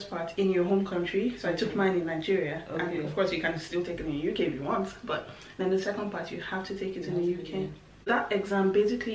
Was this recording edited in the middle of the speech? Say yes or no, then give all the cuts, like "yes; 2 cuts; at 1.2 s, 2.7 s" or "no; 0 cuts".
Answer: yes; 1 cut; at 8.0 s